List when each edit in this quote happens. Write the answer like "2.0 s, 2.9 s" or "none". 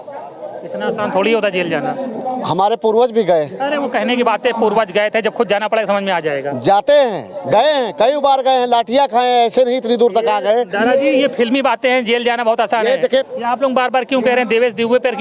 13.3 s